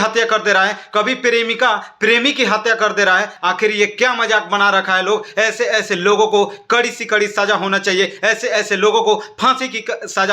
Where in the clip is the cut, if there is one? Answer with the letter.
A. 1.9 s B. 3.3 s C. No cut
B